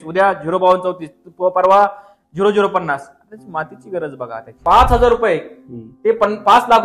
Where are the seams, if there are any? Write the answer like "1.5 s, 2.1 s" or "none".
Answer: 4.6 s